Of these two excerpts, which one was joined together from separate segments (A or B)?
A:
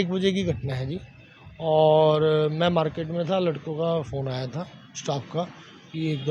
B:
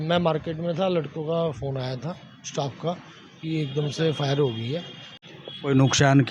B